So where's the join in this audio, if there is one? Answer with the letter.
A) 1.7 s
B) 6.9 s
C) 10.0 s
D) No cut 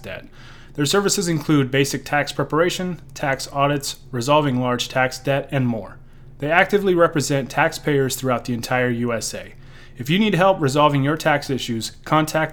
D